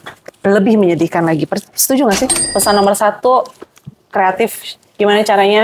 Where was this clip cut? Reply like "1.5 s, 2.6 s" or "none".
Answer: 2.4 s

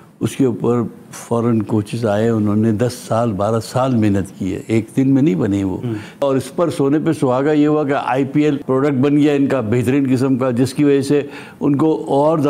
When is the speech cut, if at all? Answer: 6.2 s, 8.6 s

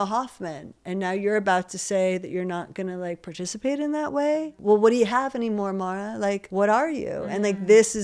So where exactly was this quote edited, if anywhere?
4.6 s, 6.4 s

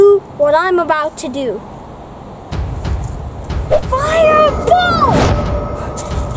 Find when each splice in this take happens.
none

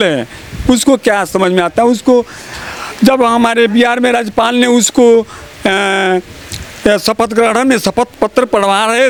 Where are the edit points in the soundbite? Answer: none

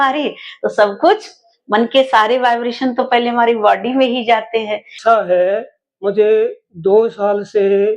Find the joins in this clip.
5.0 s

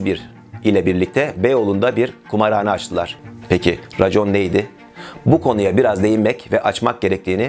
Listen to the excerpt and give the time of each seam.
3.2 s

